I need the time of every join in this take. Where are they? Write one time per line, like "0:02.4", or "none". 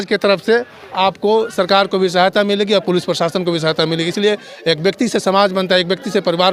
none